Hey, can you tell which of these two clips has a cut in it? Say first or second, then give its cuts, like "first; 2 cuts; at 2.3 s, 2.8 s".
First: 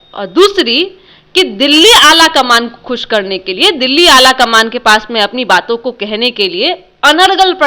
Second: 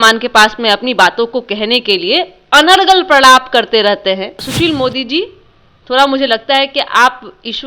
second; 1 cut; at 4.4 s